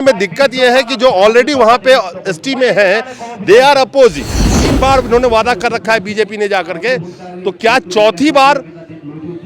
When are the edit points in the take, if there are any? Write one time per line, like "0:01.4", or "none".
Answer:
0:04.6